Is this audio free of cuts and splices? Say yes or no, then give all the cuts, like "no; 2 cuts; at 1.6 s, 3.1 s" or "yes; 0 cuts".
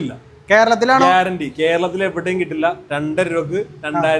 yes; 0 cuts